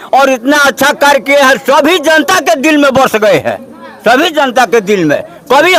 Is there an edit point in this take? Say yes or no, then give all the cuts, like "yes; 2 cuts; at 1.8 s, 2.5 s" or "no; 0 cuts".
no; 0 cuts